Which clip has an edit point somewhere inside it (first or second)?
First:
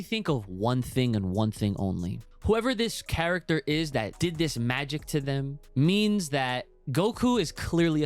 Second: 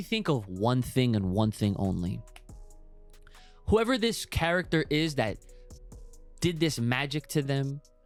first